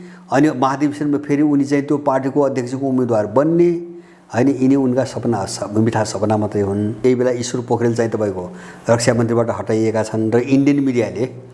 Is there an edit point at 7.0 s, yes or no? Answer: yes